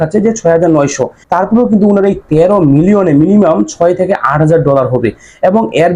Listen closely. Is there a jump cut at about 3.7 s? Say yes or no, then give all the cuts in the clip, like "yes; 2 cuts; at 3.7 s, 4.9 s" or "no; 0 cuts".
no; 1 cut; at 1.1 s